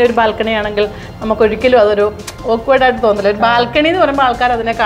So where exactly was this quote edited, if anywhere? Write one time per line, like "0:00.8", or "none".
none